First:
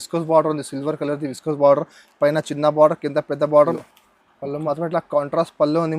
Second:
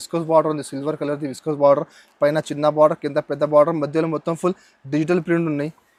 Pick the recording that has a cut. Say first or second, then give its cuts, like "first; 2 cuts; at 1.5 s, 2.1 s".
first; 1 cut; at 3.7 s